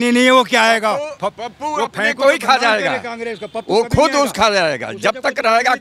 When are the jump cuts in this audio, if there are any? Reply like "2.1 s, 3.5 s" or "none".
none